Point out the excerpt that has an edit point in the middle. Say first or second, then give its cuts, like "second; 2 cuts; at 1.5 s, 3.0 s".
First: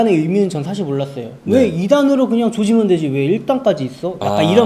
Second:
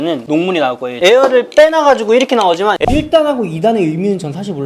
second; 2 cuts; at 0.9 s, 2.8 s